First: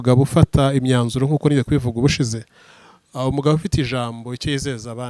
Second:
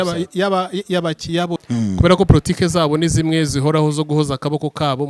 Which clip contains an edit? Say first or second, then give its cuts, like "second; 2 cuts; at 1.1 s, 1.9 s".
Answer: second; 1 cut; at 1.6 s